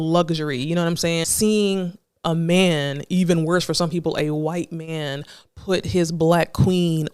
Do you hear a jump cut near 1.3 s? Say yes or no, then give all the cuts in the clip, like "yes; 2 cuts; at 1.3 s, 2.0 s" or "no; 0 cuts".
yes; 1 cut; at 1.3 s